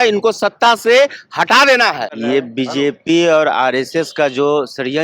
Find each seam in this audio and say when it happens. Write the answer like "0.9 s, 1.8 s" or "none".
2.1 s